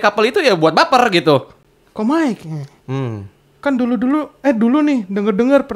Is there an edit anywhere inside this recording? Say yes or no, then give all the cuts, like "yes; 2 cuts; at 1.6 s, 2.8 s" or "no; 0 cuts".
yes; 1 cut; at 1.6 s